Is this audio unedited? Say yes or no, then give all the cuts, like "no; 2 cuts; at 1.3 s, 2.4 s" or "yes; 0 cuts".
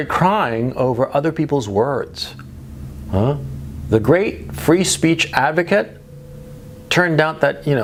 yes; 0 cuts